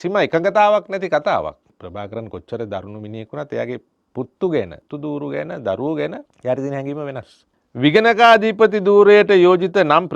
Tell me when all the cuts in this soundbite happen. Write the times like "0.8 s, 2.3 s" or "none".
1.7 s, 4.0 s, 4.8 s, 6.3 s, 7.7 s

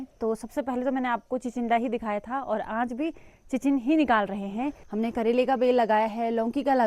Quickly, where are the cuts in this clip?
4.8 s

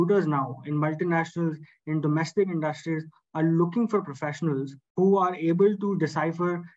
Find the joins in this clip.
4.8 s

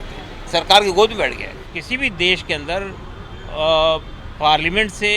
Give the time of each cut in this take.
1.7 s

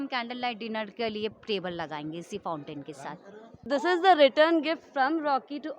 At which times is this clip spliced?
3.6 s

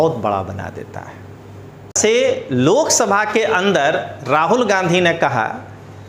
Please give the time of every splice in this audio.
2.0 s

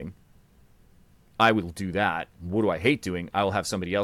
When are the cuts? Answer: none

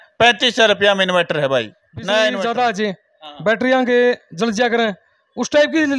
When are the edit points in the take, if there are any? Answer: 2.4 s

